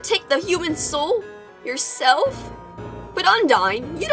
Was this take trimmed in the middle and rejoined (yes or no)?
yes